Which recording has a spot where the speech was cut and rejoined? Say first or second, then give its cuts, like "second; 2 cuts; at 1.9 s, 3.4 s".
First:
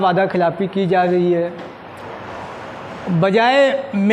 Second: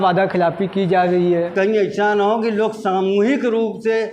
second; 1 cut; at 1.5 s